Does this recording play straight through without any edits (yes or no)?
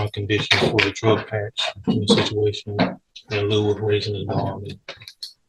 yes